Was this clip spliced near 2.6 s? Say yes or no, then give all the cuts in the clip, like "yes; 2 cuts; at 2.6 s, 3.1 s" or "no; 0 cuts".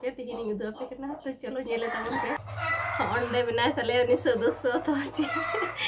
yes; 1 cut; at 2.6 s